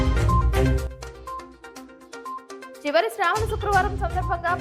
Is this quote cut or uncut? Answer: cut